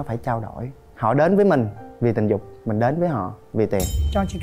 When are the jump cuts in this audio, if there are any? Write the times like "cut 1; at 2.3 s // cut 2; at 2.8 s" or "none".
cut 1; at 0.9 s